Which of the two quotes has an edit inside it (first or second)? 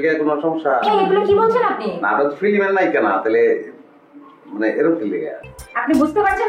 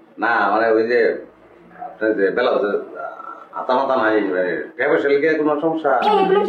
first